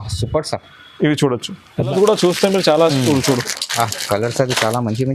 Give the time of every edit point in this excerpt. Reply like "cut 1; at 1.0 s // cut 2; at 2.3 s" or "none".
cut 1; at 1.9 s